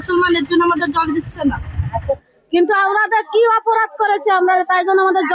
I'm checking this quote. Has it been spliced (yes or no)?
yes